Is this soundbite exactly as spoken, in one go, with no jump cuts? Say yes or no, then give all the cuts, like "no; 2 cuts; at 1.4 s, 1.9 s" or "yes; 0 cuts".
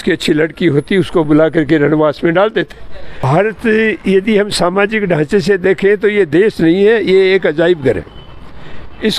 no; 1 cut; at 3.2 s